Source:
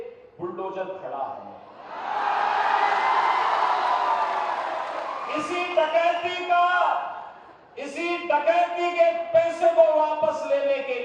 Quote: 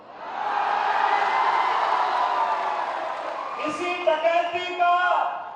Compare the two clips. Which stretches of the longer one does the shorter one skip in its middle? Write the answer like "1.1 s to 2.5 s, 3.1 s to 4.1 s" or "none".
none